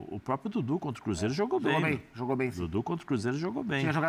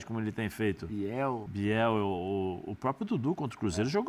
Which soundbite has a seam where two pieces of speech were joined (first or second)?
second